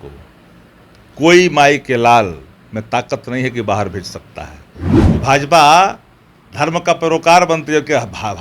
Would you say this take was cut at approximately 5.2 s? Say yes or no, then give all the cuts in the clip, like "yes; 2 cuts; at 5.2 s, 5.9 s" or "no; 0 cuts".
yes; 1 cut; at 5.2 s